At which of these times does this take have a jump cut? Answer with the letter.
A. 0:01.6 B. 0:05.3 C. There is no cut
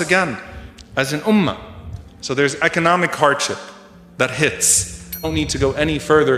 B